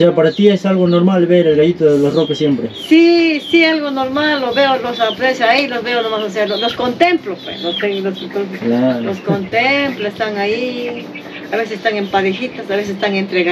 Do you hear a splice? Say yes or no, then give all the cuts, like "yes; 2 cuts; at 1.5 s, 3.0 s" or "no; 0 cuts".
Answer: no; 0 cuts